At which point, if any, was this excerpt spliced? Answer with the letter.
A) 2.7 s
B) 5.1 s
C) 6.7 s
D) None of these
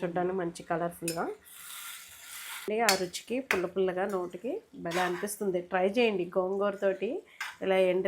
A